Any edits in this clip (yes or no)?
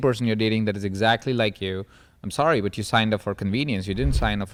no